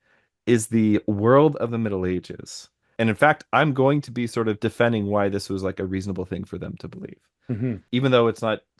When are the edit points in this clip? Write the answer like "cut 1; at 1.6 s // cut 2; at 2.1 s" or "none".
cut 1; at 2.8 s // cut 2; at 7.8 s